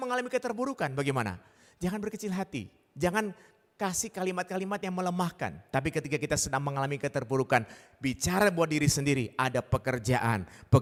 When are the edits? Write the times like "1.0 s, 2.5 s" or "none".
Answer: none